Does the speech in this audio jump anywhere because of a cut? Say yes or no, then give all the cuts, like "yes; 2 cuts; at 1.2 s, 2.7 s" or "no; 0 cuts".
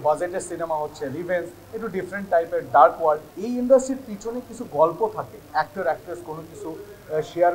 yes; 2 cuts; at 3.3 s, 5.5 s